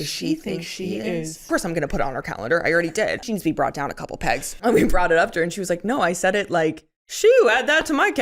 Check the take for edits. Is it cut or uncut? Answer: cut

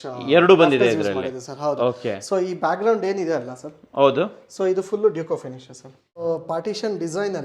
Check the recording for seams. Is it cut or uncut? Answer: cut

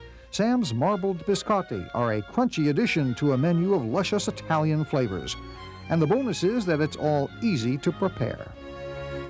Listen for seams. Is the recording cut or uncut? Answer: cut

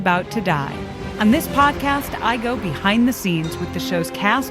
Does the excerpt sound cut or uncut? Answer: cut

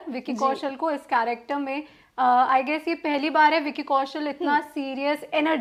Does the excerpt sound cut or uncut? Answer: uncut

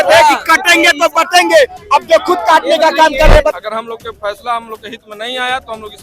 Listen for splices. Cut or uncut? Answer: cut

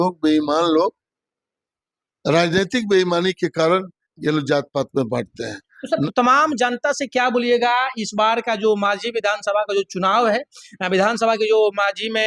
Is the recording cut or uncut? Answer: uncut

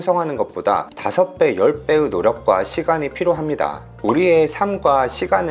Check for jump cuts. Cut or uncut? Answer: cut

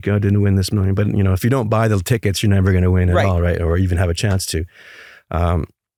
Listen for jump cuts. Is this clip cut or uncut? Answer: uncut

